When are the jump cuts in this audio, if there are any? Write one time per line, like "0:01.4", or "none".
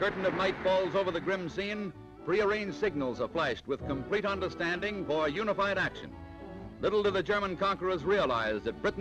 0:04.0